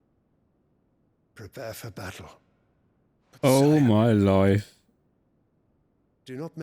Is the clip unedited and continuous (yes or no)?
yes